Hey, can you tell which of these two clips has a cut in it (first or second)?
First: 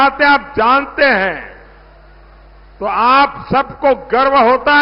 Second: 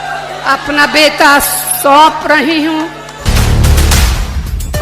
second